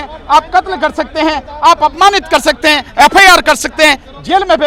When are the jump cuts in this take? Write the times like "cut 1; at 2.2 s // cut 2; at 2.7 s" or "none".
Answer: none

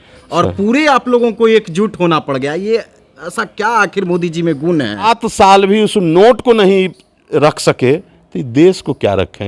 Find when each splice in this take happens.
cut 1; at 5.2 s

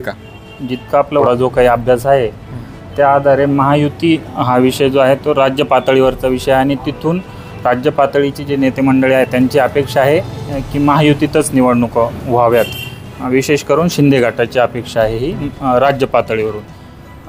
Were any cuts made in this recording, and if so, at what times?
cut 1; at 1.2 s

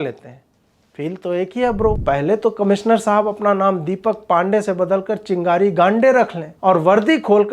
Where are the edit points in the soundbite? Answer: cut 1; at 2.0 s

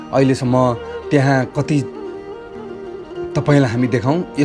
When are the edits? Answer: cut 1; at 1.8 s // cut 2; at 3.3 s

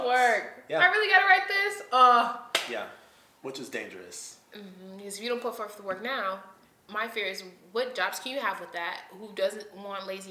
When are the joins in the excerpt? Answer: none

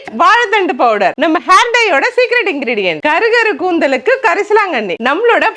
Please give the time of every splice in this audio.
none

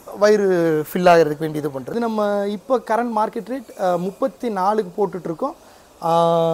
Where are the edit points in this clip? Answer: cut 1; at 1.9 s

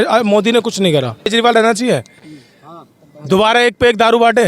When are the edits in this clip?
cut 1; at 1.3 s

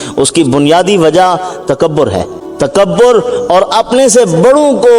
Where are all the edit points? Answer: cut 1; at 2.4 s

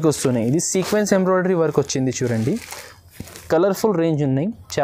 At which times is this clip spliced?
cut 1; at 3.4 s

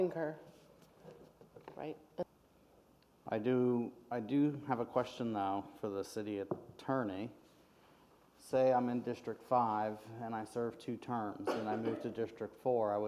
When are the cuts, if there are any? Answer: cut 1; at 2.2 s

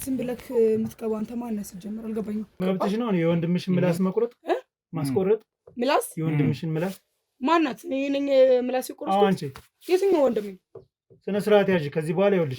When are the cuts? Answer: cut 1; at 2.5 s

